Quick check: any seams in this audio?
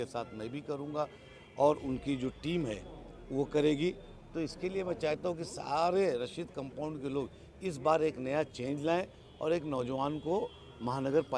no; 0 cuts

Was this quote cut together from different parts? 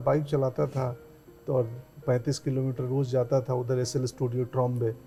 no; 0 cuts

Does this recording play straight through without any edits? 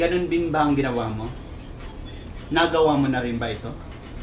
yes; 0 cuts

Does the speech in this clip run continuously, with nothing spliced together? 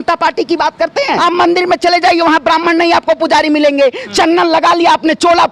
no; 1 cut; at 1.2 s

